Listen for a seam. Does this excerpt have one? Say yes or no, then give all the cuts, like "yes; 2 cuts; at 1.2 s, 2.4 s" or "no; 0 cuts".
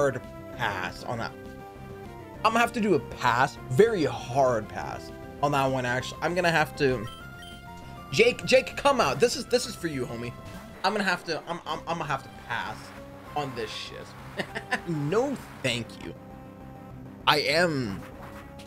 no; 0 cuts